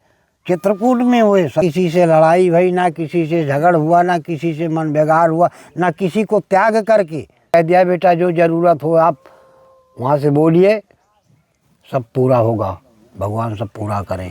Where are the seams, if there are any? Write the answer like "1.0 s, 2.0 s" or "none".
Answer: 1.6 s, 7.5 s